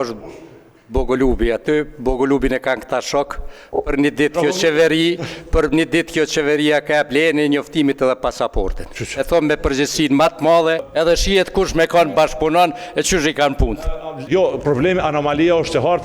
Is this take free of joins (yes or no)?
no